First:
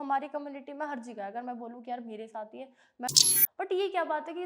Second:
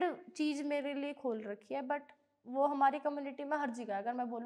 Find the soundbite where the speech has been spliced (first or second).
first